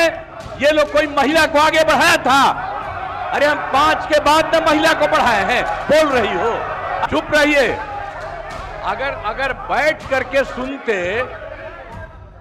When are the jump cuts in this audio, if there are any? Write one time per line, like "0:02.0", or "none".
0:07.1